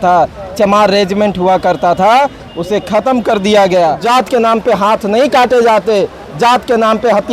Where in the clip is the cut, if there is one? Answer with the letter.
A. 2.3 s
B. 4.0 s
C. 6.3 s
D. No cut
B